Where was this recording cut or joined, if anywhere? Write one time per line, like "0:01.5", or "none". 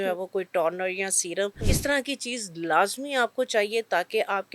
0:01.7